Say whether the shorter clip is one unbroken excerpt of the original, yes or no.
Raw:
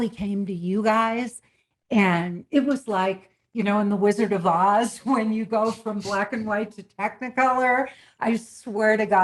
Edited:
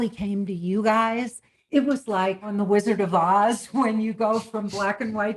no